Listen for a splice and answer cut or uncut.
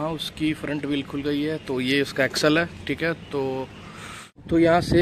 uncut